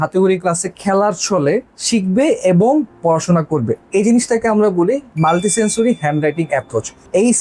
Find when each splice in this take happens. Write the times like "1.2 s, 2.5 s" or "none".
none